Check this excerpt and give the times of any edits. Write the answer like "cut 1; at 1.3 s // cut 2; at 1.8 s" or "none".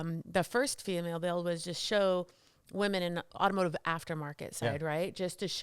cut 1; at 3.3 s